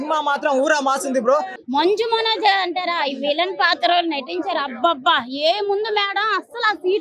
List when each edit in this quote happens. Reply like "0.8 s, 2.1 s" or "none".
1.6 s